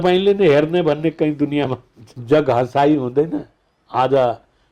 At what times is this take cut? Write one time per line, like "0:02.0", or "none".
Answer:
0:02.1